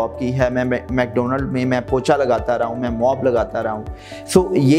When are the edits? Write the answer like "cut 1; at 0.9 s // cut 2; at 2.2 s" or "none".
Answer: none

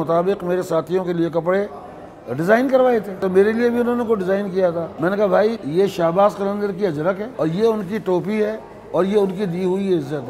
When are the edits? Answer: cut 1; at 3.2 s // cut 2; at 4.9 s // cut 3; at 5.6 s // cut 4; at 7.3 s

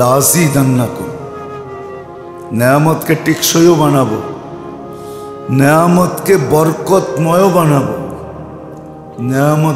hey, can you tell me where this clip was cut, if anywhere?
none

